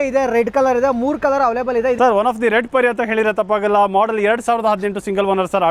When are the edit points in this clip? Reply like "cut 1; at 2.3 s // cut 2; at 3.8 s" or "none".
cut 1; at 2.0 s